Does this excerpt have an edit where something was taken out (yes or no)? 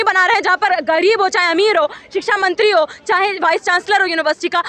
no